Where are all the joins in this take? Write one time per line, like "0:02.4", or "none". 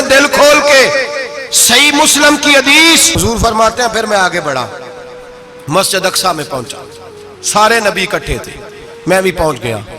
0:03.1